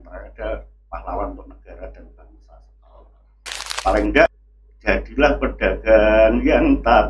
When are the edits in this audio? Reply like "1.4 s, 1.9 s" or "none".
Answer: 4.3 s